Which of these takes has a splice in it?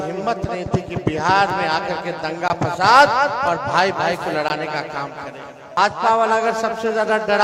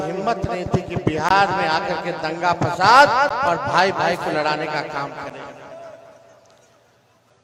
first; 1 cut; at 5.8 s

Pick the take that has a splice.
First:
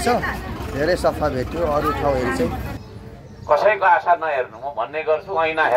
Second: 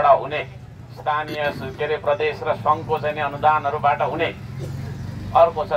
first; 1 cut; at 2.7 s

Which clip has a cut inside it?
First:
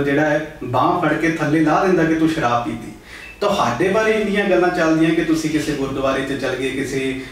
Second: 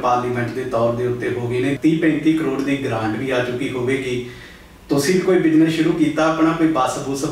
second; 1 cut; at 1.8 s

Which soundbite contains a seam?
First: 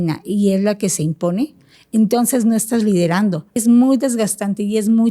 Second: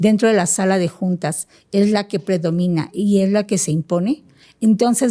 first; 1 cut; at 3.5 s

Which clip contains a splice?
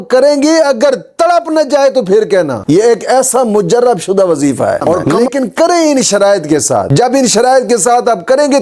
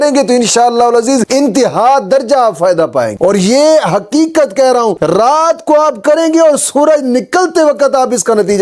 first; 1 cut; at 5.1 s

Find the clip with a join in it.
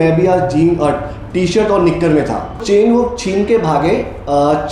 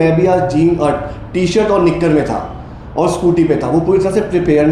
first; 1 cut; at 2.6 s

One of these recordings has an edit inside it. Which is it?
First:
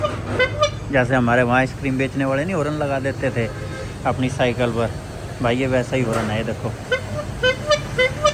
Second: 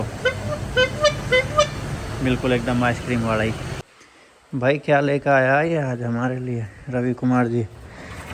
second; 1 cut; at 3.7 s

